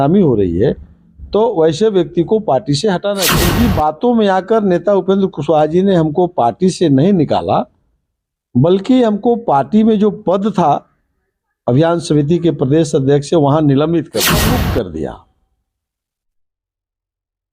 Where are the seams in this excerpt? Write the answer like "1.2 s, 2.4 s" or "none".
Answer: 3.4 s, 14.4 s